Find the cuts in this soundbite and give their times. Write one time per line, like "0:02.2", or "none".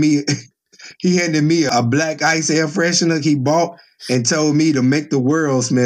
0:01.7